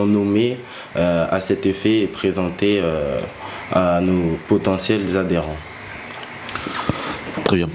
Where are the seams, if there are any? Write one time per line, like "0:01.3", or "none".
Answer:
none